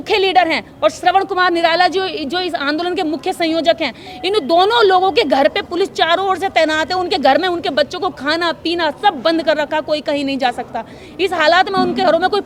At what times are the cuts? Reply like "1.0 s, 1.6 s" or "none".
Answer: none